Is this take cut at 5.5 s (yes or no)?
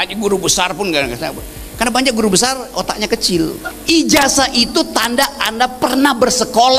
no